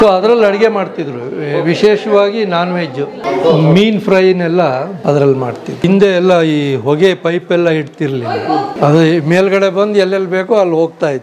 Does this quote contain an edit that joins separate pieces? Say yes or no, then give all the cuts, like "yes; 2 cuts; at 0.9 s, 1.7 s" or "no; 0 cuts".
yes; 4 cuts; at 3.2 s, 5.0 s, 5.8 s, 8.7 s